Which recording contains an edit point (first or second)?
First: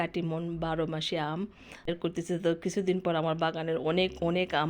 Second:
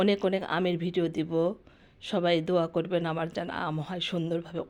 first